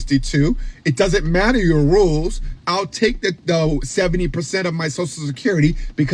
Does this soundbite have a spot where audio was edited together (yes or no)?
no